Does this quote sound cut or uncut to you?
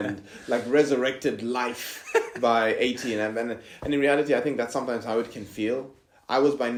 uncut